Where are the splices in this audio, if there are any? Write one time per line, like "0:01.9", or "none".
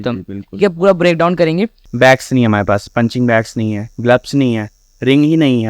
0:01.8